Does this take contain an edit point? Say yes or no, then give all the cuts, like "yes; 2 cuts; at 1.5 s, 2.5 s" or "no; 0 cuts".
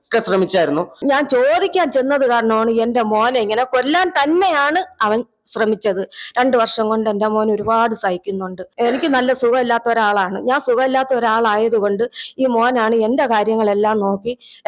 yes; 2 cuts; at 1.0 s, 8.6 s